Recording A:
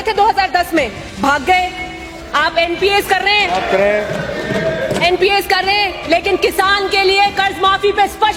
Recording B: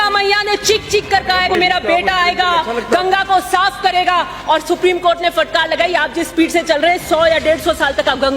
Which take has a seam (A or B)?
B